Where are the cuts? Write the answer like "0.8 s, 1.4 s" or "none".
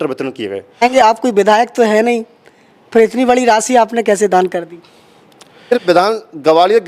0.8 s, 5.7 s